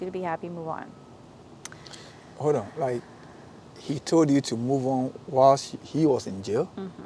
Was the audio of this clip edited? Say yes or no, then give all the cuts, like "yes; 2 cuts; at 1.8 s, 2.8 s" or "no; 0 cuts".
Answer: no; 0 cuts